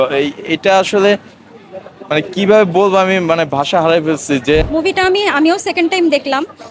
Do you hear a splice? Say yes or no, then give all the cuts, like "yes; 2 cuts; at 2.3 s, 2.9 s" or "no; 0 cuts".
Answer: yes; 1 cut; at 4.6 s